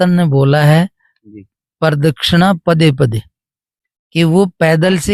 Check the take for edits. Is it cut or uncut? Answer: uncut